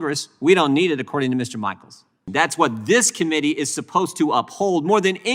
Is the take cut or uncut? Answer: cut